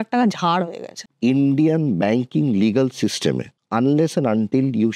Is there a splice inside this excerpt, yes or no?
yes